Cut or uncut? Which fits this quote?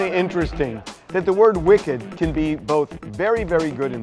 uncut